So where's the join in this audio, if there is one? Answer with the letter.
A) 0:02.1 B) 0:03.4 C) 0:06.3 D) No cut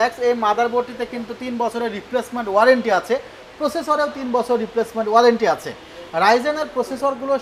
D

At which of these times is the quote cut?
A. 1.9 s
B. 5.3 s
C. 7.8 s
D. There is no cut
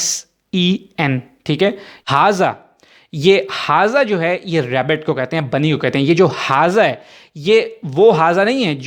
A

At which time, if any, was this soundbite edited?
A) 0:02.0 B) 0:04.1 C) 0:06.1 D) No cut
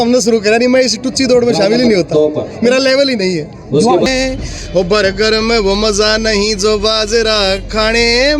B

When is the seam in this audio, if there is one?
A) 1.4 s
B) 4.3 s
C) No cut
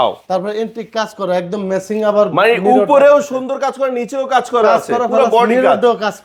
C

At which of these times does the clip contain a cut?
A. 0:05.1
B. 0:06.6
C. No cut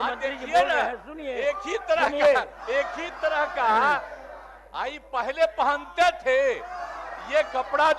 C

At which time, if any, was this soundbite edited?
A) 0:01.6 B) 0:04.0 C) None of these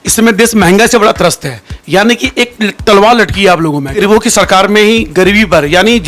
B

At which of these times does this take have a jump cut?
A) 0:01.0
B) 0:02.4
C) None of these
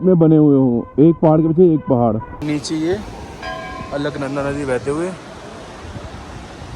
B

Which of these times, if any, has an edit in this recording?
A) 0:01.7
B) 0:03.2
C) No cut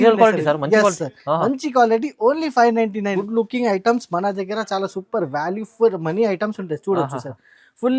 B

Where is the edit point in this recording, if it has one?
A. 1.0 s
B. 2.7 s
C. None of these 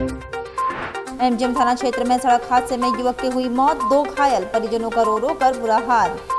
A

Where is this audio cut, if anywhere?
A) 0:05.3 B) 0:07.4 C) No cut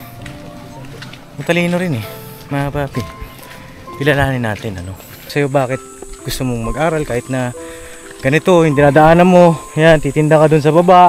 A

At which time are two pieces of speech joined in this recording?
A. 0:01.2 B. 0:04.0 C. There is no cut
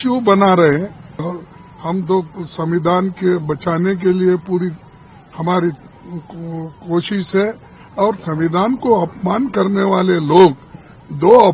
A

